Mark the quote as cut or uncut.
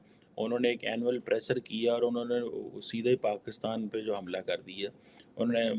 uncut